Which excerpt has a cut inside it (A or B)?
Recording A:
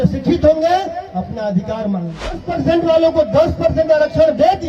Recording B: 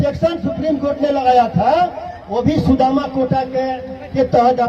A